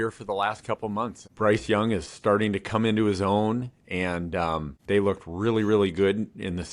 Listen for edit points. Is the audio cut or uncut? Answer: cut